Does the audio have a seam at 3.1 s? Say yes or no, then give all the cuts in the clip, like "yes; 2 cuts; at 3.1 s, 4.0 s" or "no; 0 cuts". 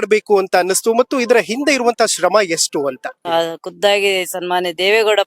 yes; 1 cut; at 3.1 s